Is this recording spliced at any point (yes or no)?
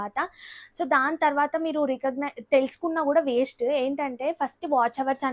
no